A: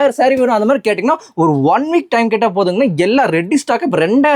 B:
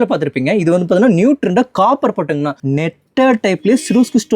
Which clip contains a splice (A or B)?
B